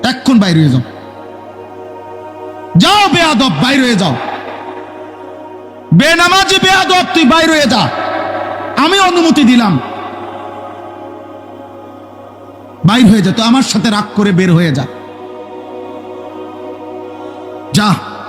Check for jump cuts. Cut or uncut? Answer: uncut